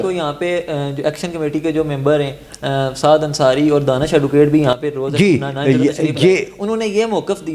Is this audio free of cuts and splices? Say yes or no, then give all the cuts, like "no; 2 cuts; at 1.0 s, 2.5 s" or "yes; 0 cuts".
yes; 0 cuts